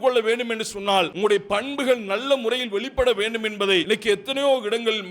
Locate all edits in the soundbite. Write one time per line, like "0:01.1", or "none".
0:01.1
0:03.8